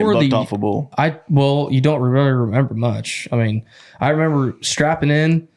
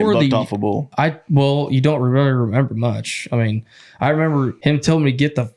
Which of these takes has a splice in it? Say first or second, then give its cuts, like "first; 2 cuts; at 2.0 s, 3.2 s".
second; 1 cut; at 4.5 s